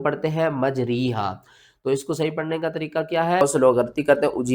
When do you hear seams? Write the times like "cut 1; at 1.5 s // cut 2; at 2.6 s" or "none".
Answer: cut 1; at 3.4 s

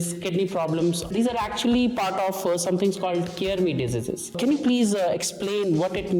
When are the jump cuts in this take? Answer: cut 1; at 1.1 s // cut 2; at 4.4 s

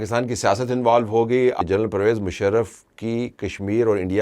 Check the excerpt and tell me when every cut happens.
cut 1; at 1.6 s

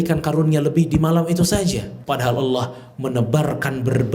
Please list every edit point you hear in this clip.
cut 1; at 1.9 s

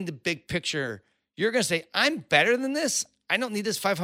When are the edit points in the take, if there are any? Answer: none

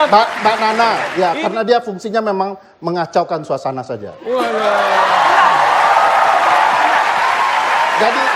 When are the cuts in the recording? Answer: cut 1; at 1.1 s

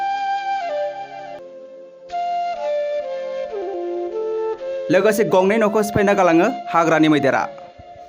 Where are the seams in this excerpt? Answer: cut 1; at 1.4 s // cut 2; at 4.9 s

